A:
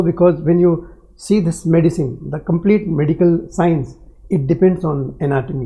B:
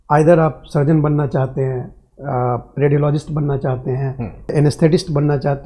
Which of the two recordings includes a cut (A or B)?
B